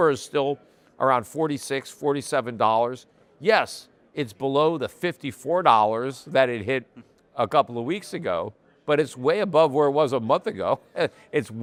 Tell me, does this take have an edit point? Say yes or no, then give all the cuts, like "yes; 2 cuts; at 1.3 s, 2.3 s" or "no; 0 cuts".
no; 0 cuts